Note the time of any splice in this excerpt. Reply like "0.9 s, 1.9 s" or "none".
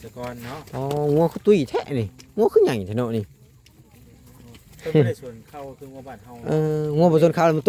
none

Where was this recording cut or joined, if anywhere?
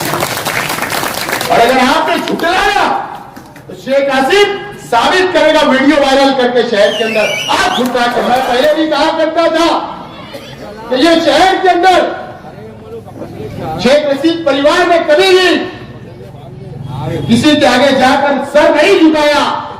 8.3 s

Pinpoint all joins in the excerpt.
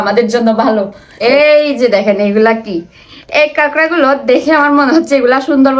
1.0 s

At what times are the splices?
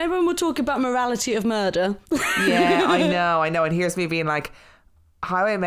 none

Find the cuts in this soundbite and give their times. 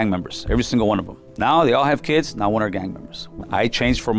1.2 s, 3.4 s

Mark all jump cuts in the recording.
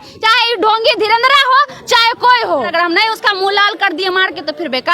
2.7 s

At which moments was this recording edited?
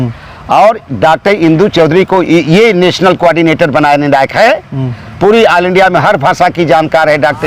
none

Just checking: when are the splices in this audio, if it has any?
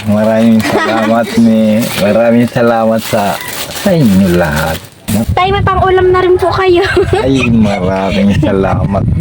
4.9 s

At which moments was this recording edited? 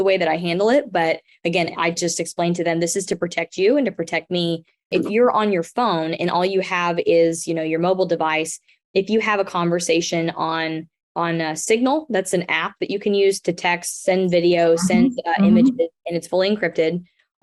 none

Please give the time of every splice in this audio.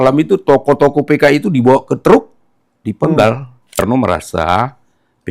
3.8 s

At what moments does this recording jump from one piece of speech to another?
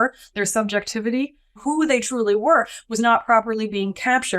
1.6 s

